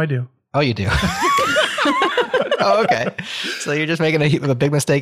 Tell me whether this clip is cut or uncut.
uncut